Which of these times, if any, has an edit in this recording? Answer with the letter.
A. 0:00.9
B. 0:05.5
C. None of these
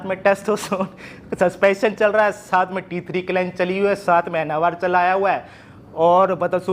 C